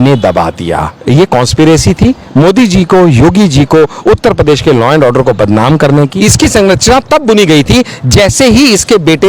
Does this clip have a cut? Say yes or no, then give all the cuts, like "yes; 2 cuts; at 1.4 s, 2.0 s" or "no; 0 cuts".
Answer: yes; 2 cuts; at 0.9 s, 6.1 s